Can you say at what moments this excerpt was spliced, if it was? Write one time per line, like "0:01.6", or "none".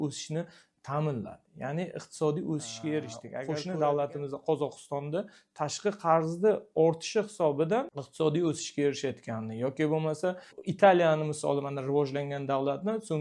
0:03.3